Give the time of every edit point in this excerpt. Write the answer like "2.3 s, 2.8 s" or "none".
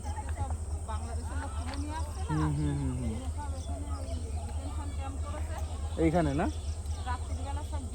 none